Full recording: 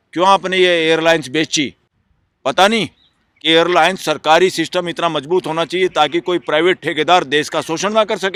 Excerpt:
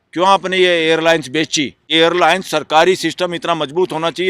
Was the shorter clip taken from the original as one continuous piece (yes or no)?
no